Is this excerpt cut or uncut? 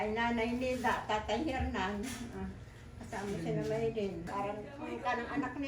cut